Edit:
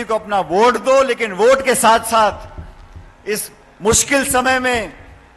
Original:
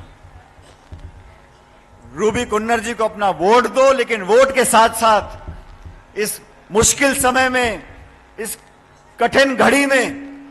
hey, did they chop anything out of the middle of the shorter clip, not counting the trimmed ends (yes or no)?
no